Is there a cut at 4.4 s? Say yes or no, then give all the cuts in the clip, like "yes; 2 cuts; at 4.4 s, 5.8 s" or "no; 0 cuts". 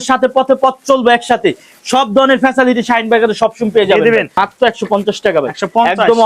yes; 1 cut; at 4.4 s